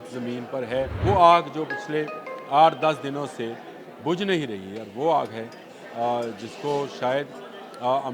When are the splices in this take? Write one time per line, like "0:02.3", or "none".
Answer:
0:00.9